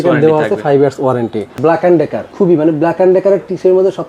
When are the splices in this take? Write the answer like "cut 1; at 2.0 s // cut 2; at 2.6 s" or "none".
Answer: cut 1; at 1.5 s // cut 2; at 2.3 s